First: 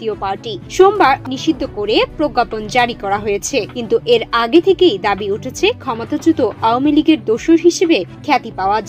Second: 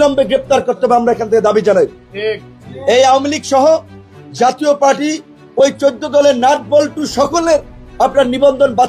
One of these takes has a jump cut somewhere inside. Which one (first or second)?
first